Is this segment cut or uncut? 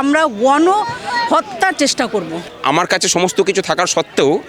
cut